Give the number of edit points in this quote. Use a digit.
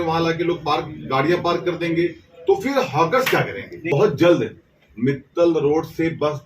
1